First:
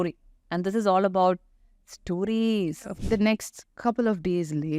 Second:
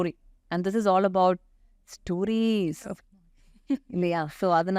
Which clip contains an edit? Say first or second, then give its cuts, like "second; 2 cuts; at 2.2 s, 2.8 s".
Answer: first; 1 cut; at 2.9 s